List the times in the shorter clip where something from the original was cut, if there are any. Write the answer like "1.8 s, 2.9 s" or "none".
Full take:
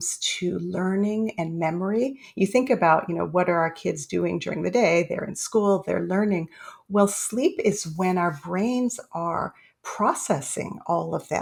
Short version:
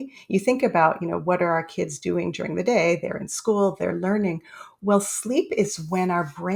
none